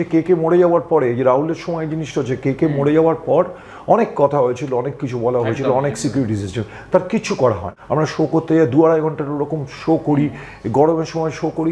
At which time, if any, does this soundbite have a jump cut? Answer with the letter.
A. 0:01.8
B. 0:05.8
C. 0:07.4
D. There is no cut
C